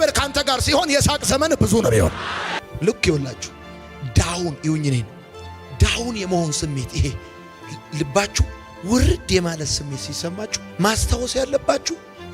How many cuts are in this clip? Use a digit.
1